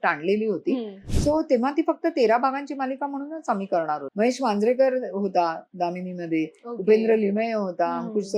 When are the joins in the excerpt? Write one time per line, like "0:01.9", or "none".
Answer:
0:01.0
0:04.0